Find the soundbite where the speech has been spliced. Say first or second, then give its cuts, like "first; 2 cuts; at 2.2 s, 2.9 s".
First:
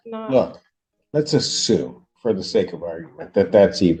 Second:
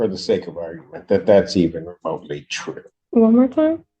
second; 1 cut; at 2.9 s